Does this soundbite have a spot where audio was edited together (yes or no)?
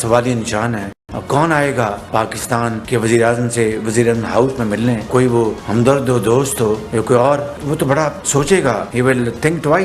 no